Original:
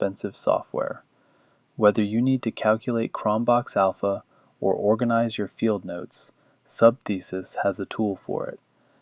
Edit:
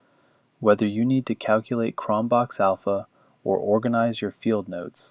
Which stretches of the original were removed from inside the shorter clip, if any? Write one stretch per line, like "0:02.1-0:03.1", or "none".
none